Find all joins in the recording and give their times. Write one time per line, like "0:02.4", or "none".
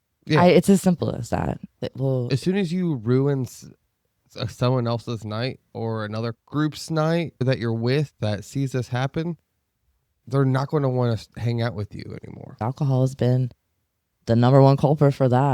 0:01.7
0:12.6